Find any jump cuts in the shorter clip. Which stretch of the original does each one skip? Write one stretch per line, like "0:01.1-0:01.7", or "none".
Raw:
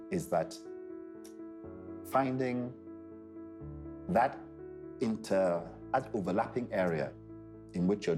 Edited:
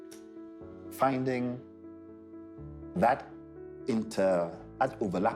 0:02.0-0:02.1